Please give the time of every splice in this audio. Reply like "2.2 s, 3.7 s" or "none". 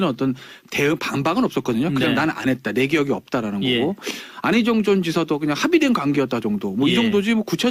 3.2 s